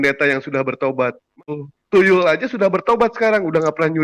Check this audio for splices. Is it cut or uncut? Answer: cut